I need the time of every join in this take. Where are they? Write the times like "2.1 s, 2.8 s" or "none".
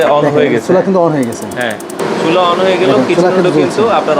2.0 s